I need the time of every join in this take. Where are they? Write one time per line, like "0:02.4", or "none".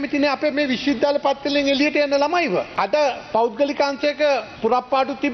0:02.7
0:04.5